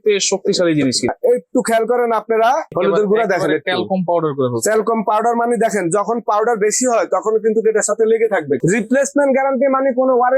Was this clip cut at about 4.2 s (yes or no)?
no